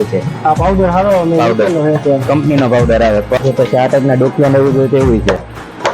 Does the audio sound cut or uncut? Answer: cut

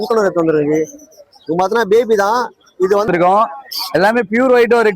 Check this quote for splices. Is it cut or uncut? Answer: cut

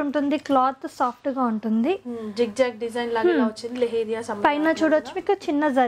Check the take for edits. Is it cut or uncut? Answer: uncut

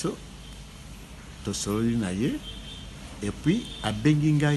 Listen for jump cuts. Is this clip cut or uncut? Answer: uncut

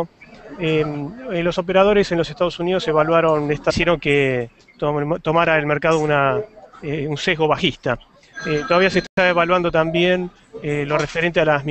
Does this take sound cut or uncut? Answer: uncut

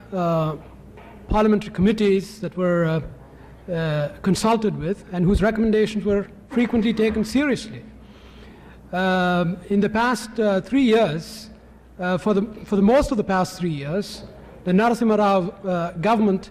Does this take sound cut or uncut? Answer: cut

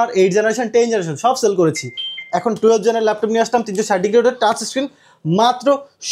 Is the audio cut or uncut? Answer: uncut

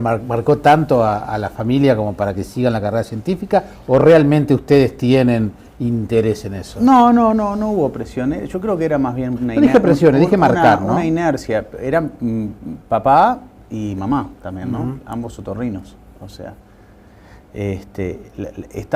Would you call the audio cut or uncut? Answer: cut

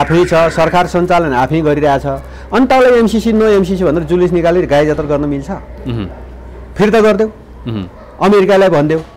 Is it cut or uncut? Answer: uncut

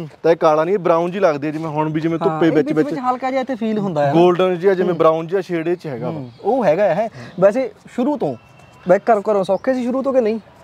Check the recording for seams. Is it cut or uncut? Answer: uncut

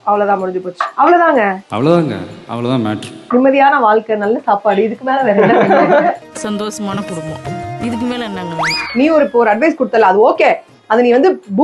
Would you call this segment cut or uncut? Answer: cut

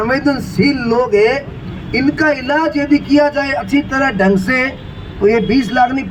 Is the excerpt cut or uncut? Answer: uncut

